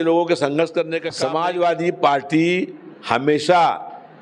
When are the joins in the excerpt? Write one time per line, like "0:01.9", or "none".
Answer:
0:01.0